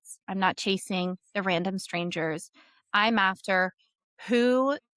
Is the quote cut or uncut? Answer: uncut